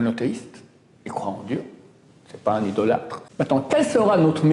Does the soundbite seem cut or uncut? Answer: cut